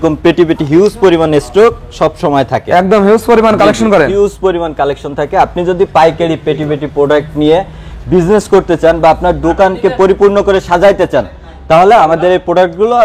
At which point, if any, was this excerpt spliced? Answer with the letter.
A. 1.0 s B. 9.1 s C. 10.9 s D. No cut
D